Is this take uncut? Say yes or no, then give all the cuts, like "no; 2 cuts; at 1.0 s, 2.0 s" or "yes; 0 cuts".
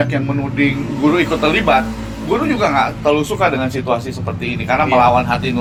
yes; 0 cuts